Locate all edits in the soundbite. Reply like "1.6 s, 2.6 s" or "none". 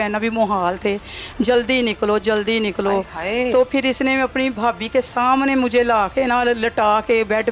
4.5 s